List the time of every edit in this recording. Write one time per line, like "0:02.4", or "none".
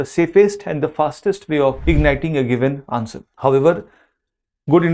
0:01.8
0:03.2